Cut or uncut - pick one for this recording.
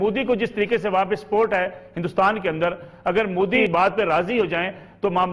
cut